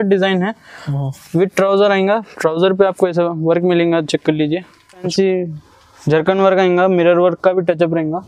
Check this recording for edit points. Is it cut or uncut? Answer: cut